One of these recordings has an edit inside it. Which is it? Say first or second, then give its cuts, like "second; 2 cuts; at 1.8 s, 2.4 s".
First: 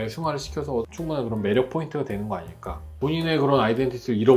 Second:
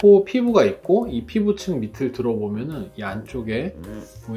first; 2 cuts; at 0.9 s, 2.9 s